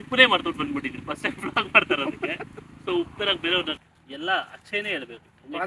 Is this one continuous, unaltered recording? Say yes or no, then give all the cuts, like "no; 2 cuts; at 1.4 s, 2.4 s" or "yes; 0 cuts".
no; 1 cut; at 3.9 s